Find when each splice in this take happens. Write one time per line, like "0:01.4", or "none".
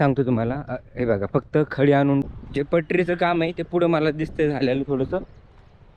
0:02.2